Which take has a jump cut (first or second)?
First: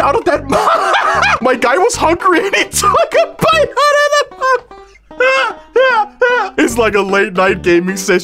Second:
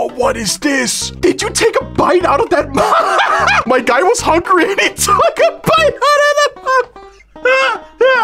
second